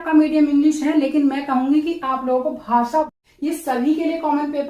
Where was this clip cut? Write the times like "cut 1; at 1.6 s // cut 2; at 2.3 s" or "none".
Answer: cut 1; at 3.1 s